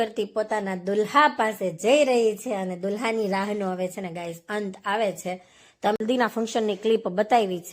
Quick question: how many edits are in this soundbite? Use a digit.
1